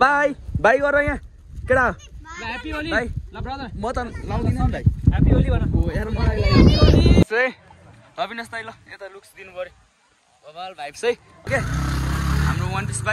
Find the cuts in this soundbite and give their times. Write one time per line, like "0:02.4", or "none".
0:07.2
0:11.5